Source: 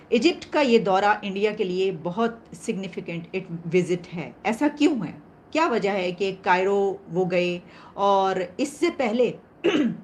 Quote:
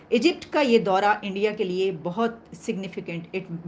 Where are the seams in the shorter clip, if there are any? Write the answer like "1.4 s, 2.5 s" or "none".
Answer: none